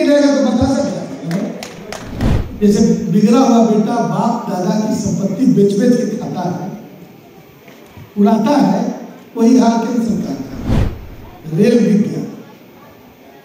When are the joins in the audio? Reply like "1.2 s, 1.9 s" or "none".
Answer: 2.2 s